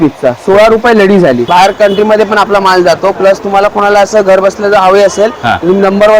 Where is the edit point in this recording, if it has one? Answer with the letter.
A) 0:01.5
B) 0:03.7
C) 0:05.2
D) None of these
A